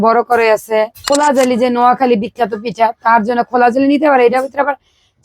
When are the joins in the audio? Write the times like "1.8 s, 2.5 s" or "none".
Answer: 1.0 s